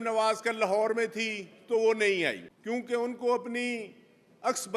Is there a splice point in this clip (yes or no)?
yes